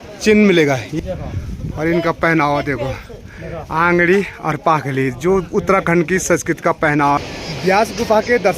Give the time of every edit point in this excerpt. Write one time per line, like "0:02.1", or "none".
0:00.9
0:07.2